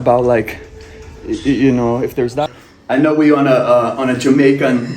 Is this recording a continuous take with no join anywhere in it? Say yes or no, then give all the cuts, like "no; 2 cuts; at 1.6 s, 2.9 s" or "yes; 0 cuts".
no; 1 cut; at 2.4 s